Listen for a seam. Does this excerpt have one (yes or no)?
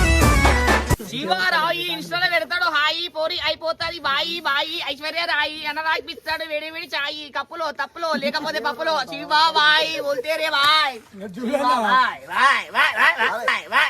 yes